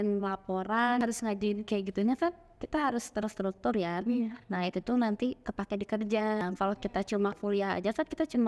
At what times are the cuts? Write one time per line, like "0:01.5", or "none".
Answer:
0:01.0
0:06.4